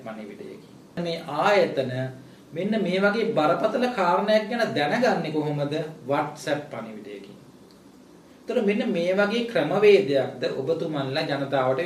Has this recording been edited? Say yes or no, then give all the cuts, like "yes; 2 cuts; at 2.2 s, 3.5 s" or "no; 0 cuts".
yes; 1 cut; at 1.0 s